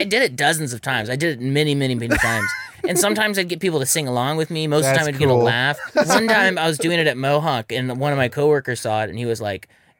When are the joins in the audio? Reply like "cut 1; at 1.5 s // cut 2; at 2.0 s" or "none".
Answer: cut 1; at 5.8 s